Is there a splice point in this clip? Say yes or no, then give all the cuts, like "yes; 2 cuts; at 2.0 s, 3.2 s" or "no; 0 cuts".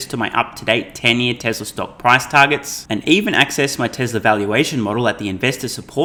no; 0 cuts